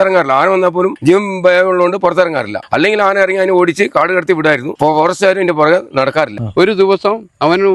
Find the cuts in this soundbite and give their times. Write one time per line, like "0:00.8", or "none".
0:01.0
0:02.6
0:04.7
0:06.4